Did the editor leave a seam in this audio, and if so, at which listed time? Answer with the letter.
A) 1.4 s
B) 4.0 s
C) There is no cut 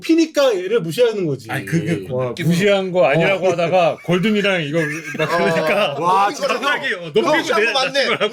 C